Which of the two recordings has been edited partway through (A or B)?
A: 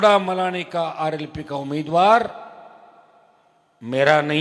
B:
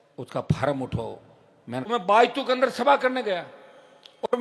B